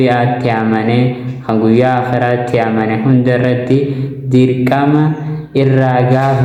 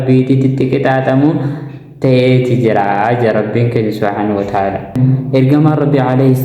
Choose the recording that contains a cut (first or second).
second